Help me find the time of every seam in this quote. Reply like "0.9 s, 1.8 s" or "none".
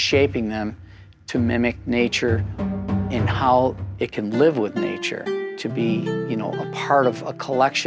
5.4 s